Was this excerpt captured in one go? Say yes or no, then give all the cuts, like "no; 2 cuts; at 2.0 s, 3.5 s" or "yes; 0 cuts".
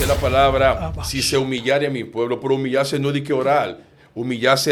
yes; 0 cuts